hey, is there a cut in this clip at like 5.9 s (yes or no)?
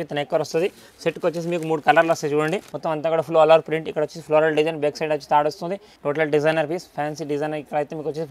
yes